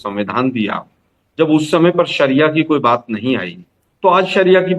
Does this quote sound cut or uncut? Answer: uncut